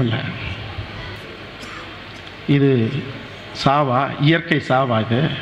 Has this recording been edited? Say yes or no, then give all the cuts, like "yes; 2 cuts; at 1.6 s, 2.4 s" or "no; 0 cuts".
yes; 1 cut; at 1.2 s